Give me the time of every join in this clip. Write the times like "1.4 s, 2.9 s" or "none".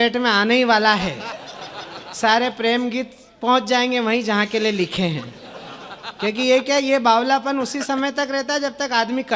none